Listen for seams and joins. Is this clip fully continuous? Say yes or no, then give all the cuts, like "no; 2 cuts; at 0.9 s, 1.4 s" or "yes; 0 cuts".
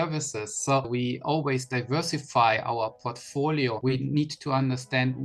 no; 2 cuts; at 0.9 s, 3.8 s